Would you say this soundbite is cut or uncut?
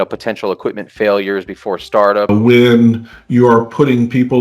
cut